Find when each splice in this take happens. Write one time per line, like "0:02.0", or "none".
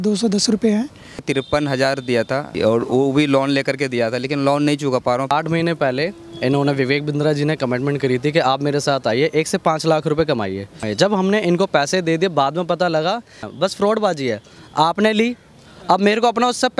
0:01.3
0:02.6
0:05.3
0:10.8
0:13.5